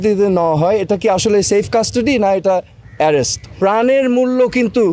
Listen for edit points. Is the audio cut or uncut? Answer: cut